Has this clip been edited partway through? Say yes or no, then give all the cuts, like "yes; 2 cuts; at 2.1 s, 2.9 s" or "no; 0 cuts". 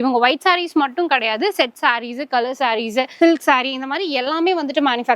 yes; 1 cut; at 3.1 s